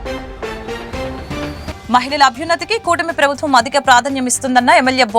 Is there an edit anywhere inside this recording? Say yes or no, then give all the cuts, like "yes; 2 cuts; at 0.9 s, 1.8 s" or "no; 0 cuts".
yes; 1 cut; at 1.7 s